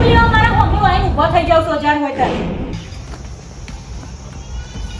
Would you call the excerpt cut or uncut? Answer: cut